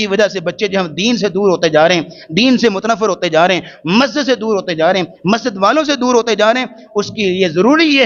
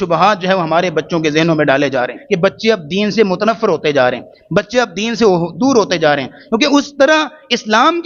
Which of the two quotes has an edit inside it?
second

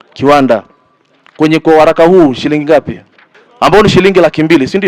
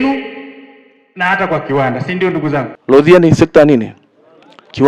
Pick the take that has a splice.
second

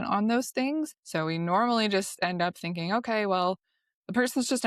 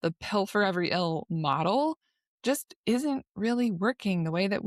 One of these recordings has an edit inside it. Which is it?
first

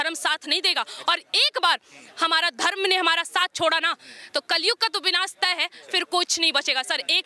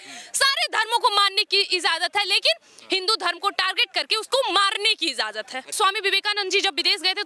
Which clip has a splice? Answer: second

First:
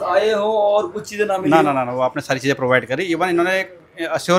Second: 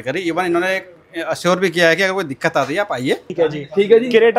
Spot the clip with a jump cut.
second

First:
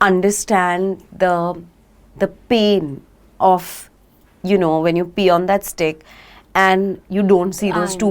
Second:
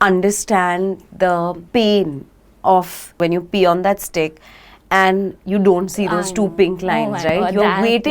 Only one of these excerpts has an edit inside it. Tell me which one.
second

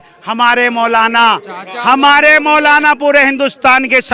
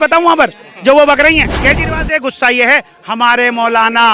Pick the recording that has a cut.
second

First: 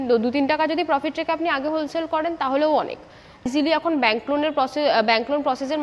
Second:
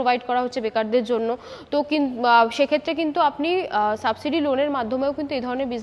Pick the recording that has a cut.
first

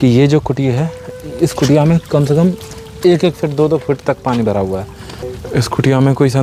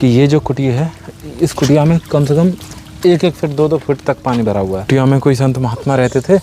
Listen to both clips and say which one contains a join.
second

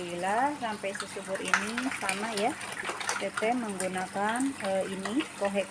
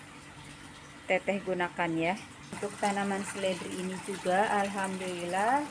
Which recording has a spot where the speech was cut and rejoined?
second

